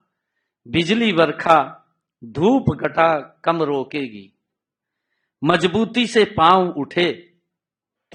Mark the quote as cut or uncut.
uncut